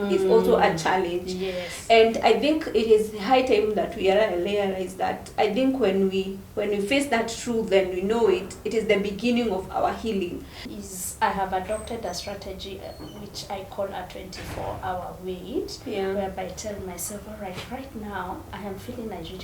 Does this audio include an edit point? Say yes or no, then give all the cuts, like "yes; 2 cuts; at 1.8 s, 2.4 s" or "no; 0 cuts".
yes; 1 cut; at 10.7 s